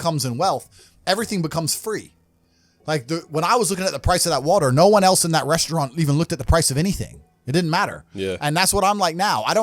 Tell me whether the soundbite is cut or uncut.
uncut